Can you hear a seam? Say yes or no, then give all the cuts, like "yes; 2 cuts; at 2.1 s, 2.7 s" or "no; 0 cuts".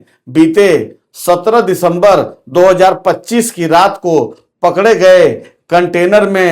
no; 0 cuts